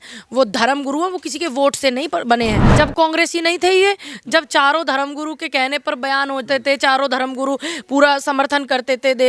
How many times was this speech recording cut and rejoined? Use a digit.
1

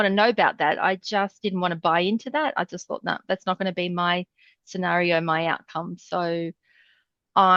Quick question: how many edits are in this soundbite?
0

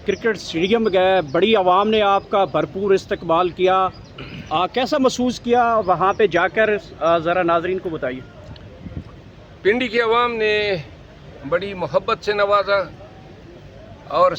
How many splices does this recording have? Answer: 0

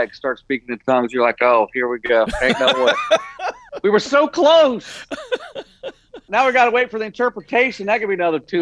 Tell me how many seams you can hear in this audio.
2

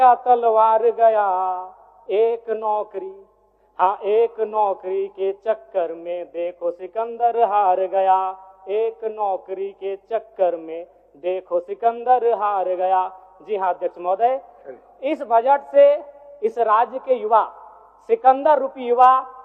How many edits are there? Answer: 0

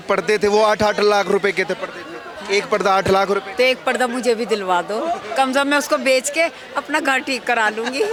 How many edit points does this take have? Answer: 0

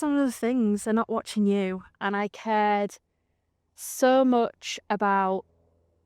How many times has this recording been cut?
1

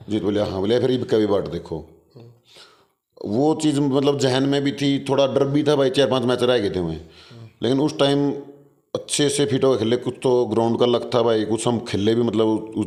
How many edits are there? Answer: 0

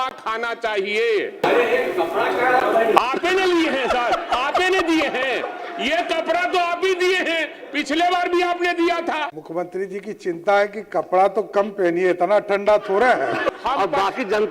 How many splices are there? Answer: 3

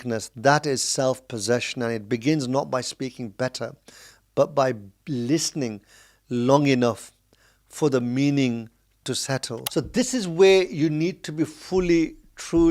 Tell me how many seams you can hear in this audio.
1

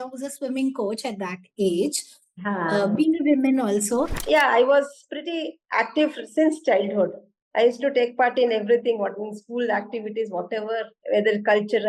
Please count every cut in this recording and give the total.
2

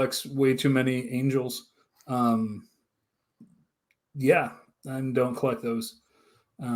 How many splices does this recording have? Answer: 0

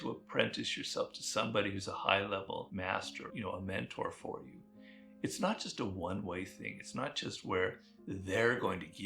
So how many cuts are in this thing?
1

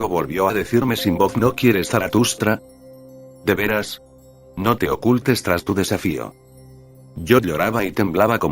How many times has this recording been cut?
1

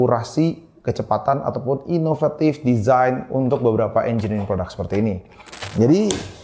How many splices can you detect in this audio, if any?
1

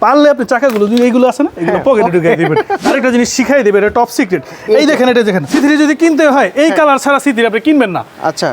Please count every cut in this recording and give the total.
2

